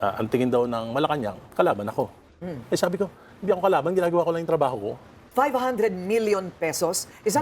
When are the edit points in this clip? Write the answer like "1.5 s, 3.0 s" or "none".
1.4 s, 5.1 s